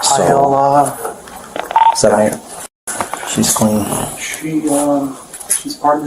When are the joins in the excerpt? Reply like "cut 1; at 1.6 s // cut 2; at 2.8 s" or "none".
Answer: cut 1; at 1.6 s